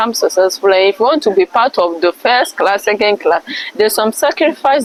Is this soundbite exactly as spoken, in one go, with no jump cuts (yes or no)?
yes